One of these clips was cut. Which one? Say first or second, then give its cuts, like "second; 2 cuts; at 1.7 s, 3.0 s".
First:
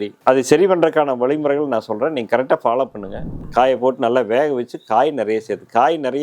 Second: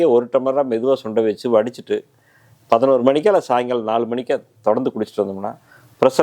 first; 1 cut; at 3.3 s